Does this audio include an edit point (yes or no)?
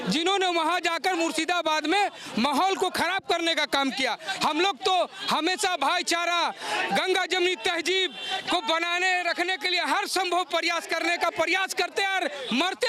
no